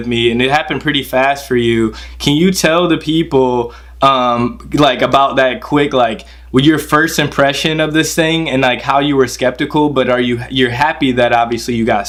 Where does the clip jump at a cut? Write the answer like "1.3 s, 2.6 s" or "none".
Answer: none